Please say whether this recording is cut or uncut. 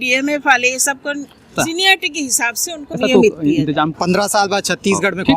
cut